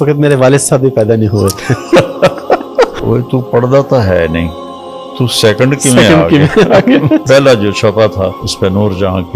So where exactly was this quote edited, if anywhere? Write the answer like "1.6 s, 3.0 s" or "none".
none

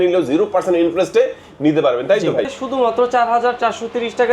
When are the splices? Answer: 2.6 s

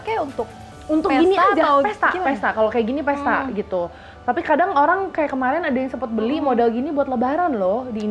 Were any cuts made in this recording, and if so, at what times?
none

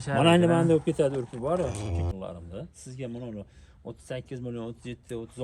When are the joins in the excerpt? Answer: 2.1 s

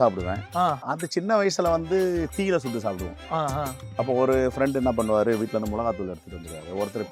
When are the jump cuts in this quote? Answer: 0.9 s

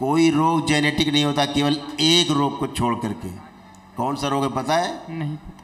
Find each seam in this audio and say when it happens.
none

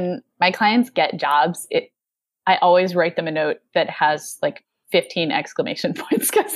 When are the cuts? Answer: none

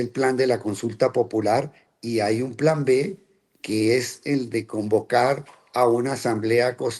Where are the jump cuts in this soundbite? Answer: none

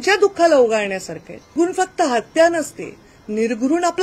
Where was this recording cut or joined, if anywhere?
1.5 s

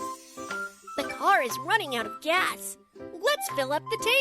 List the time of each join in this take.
0.9 s

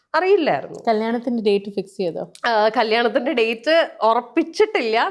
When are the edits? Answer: none

